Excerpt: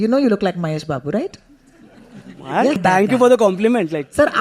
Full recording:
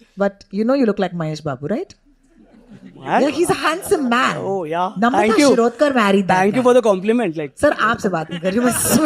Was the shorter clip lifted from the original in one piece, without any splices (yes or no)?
no